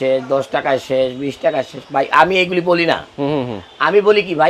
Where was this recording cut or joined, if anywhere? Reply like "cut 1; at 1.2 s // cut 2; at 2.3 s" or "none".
none